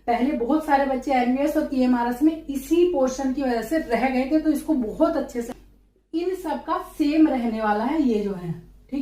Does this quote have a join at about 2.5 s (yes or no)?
no